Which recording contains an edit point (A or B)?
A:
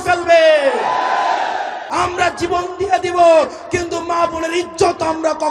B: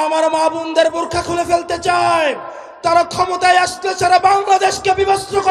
A